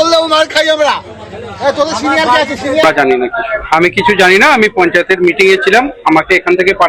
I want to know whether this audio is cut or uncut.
cut